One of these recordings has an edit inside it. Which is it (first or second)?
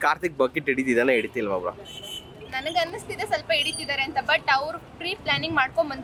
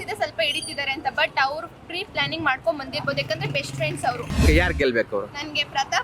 second